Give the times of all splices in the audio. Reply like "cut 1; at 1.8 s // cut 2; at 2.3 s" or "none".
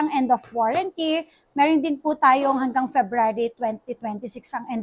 none

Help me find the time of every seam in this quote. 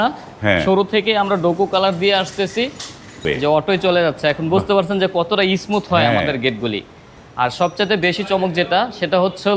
cut 1; at 3.2 s

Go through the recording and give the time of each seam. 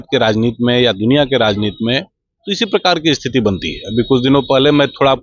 none

